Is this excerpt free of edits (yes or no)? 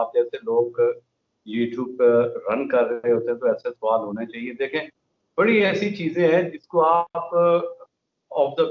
yes